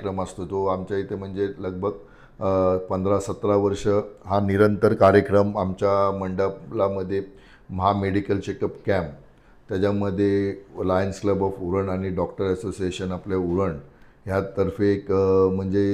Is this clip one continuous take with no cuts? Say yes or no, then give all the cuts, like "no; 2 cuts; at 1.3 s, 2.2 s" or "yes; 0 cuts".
yes; 0 cuts